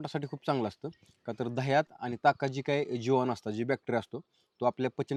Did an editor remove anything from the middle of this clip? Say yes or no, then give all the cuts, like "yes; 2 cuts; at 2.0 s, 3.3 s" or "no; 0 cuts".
no; 0 cuts